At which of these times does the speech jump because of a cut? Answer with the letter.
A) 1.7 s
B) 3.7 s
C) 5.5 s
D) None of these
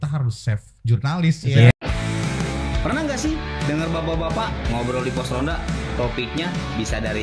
A